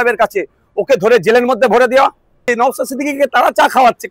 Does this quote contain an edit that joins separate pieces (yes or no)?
yes